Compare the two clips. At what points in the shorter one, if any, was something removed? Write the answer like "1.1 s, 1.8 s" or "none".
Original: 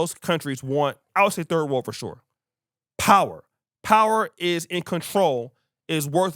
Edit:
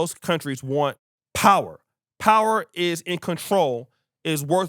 1.0 s